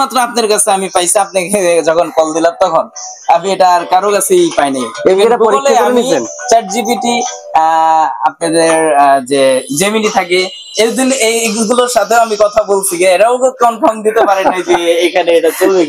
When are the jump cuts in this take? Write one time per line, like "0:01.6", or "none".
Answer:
none

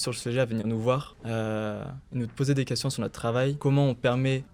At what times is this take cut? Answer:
none

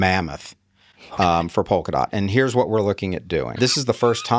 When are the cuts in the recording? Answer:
0:03.5

